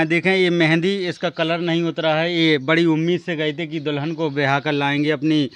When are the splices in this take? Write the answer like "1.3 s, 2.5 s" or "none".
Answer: none